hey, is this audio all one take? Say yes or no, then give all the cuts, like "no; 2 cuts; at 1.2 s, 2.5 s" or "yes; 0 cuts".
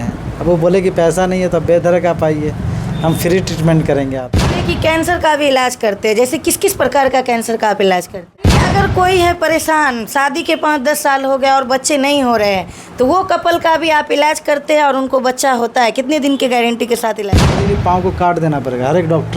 no; 3 cuts; at 4.6 s, 8.6 s, 17.7 s